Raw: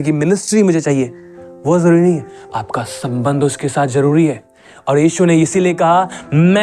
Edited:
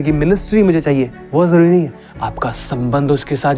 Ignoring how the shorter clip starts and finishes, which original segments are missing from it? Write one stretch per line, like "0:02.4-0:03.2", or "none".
0:01.2-0:01.5